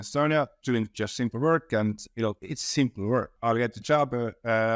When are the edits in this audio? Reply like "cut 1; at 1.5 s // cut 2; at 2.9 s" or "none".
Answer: cut 1; at 3.3 s

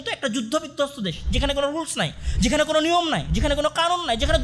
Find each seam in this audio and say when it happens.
none

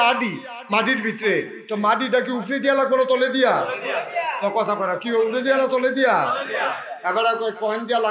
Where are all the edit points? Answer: none

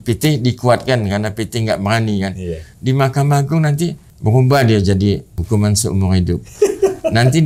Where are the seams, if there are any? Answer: cut 1; at 4.1 s // cut 2; at 5.3 s

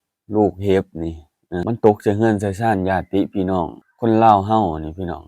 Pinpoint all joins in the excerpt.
cut 1; at 1.6 s // cut 2; at 3.8 s

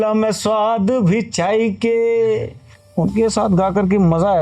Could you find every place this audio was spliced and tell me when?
cut 1; at 2.8 s

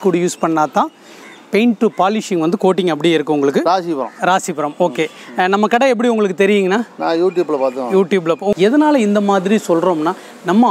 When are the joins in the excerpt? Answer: cut 1; at 3.6 s // cut 2; at 8.5 s

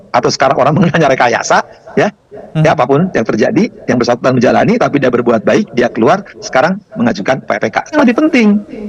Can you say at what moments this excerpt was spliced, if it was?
cut 1; at 8.0 s

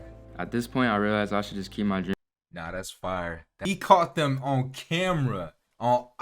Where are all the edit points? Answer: cut 1; at 2.1 s // cut 2; at 3.5 s

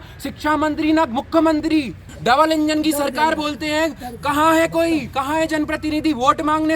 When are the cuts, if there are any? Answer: cut 1; at 2.0 s

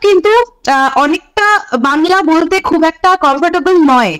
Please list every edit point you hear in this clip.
none

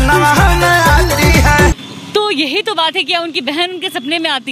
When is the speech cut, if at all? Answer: cut 1; at 1.4 s

